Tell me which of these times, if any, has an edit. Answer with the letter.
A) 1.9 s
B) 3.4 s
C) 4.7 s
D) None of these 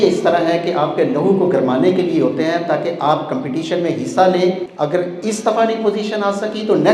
C